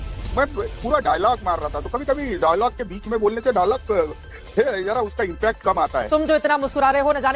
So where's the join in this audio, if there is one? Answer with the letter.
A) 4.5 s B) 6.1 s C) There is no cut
B